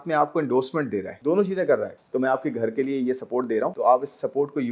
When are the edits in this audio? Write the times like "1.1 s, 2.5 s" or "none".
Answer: 1.1 s, 1.9 s, 3.7 s